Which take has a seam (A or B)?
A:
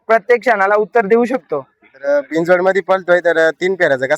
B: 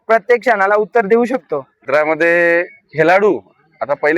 B